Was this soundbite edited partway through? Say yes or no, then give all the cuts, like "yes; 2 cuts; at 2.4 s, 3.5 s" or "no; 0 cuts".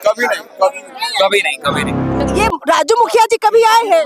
yes; 1 cut; at 2.3 s